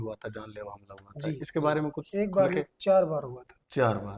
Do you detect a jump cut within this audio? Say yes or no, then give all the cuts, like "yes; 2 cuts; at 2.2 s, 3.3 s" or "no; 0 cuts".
no; 0 cuts